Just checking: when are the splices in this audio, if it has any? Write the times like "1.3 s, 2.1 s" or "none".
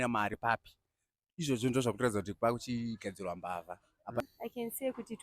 4.2 s